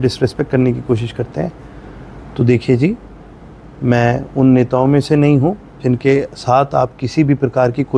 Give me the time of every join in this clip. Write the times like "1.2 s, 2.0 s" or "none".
none